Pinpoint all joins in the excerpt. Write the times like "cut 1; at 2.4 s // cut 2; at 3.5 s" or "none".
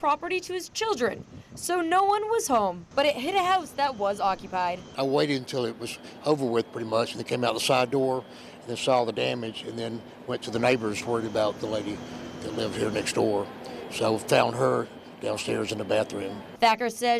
none